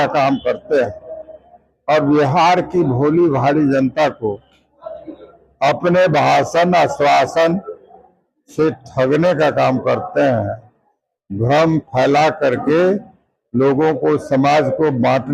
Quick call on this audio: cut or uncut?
uncut